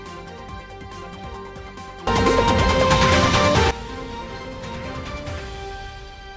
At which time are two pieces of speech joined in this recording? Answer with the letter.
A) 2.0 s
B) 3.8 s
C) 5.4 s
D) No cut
A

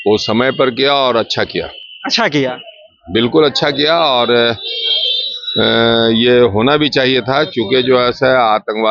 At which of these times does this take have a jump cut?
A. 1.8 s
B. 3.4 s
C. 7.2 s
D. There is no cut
D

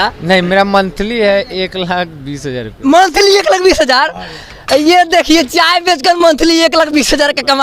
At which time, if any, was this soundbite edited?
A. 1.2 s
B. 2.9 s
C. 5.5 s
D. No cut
D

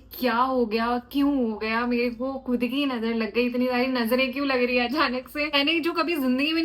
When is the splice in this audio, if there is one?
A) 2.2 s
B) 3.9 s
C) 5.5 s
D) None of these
C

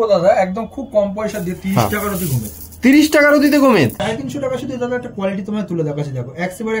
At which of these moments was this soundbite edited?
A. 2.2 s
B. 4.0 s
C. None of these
B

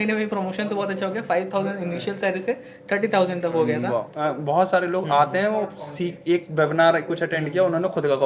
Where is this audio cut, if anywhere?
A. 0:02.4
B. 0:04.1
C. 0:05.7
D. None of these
B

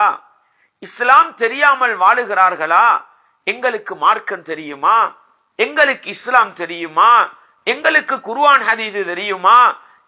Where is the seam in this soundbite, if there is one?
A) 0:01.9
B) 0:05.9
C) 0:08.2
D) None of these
D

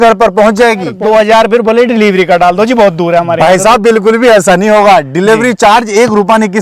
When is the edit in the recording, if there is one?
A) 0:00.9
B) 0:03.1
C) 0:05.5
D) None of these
A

